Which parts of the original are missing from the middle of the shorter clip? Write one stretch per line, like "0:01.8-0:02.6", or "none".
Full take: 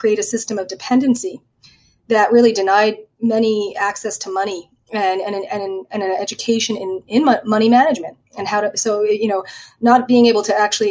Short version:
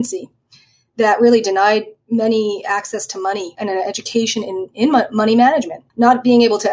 0:04.6-0:05.9
0:08.1-0:09.6